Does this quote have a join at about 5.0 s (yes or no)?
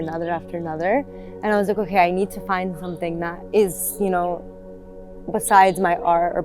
no